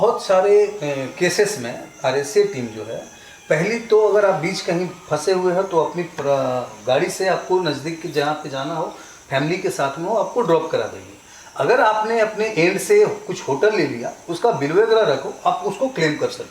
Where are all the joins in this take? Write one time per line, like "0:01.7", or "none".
none